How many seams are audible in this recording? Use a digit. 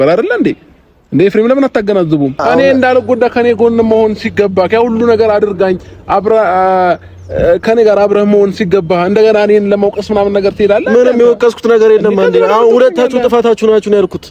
1